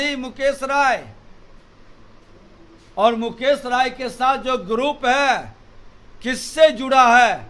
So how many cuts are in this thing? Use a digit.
0